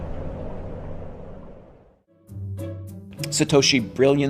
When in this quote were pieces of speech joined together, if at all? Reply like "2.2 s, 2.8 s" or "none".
none